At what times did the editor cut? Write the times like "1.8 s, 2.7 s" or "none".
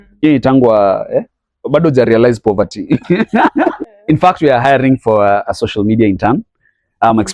3.9 s